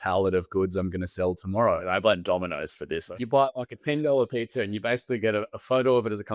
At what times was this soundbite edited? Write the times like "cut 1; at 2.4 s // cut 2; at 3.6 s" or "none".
cut 1; at 1.8 s // cut 2; at 3.0 s